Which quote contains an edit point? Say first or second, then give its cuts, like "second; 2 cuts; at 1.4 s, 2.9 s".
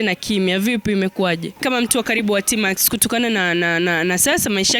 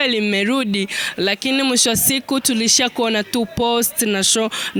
first; 1 cut; at 1.6 s